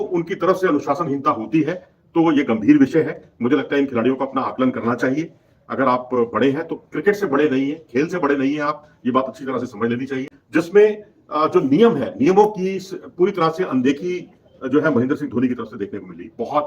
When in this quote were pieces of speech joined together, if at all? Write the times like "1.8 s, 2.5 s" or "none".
10.4 s